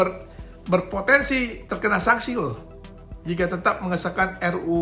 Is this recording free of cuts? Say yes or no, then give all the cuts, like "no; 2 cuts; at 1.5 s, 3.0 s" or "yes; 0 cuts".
yes; 0 cuts